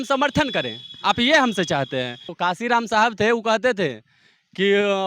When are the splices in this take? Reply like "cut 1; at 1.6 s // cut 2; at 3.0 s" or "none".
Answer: cut 1; at 2.2 s